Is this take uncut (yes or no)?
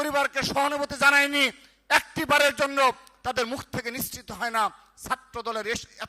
yes